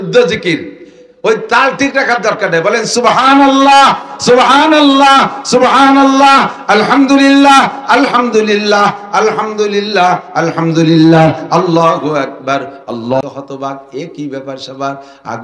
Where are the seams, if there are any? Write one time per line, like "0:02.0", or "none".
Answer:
0:13.2